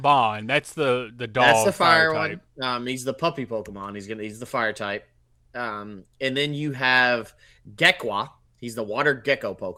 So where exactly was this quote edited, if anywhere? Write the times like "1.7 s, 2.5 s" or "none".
none